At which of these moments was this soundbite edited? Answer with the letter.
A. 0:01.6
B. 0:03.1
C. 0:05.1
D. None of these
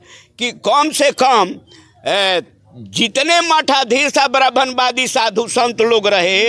D